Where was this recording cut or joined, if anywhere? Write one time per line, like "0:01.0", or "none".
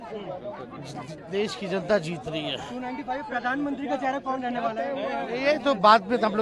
none